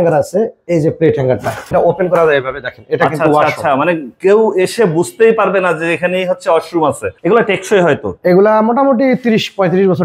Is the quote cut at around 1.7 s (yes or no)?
yes